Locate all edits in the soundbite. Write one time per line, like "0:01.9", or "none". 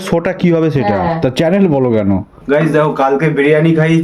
0:02.4